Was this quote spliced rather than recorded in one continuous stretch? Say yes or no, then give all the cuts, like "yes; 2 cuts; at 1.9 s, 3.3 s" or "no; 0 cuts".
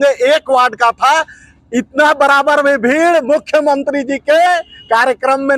no; 0 cuts